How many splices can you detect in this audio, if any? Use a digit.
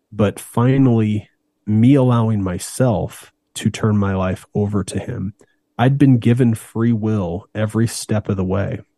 1